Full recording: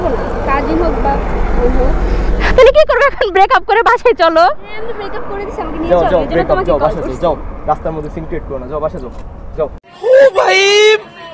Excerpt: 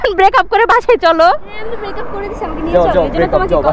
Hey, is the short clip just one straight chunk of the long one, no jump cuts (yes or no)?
yes